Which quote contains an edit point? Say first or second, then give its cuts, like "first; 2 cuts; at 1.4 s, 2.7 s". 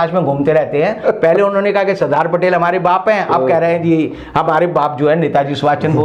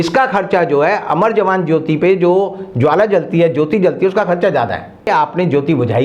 second; 1 cut; at 5.0 s